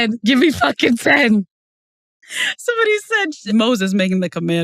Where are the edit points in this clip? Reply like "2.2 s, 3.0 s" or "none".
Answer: 3.4 s